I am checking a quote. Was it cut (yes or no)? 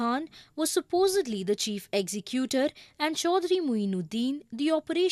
yes